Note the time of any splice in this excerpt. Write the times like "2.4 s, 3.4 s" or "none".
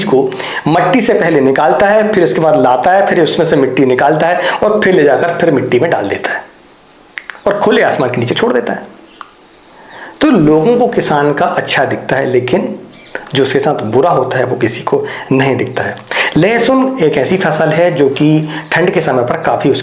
none